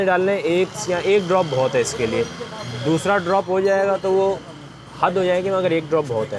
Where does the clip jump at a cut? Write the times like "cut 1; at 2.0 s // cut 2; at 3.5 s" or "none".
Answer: none